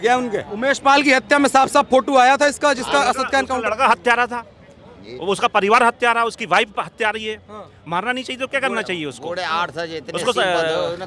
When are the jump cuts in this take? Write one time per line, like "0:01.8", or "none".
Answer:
none